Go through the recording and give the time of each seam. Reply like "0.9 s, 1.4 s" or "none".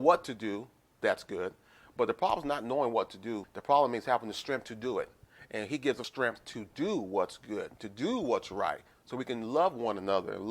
3.4 s, 6.1 s